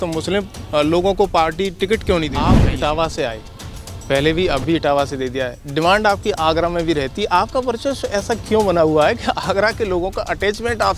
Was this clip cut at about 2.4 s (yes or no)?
yes